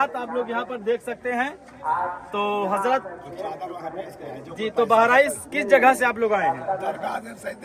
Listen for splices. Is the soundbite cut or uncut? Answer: uncut